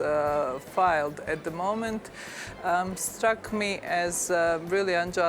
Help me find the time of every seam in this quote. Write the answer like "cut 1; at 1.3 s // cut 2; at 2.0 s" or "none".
none